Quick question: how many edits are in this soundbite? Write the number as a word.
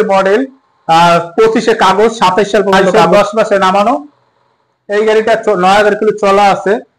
one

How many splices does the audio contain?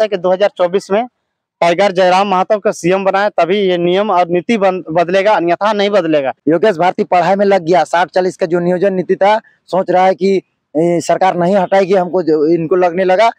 one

